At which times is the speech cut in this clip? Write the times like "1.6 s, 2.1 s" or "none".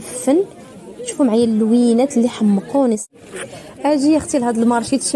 3.1 s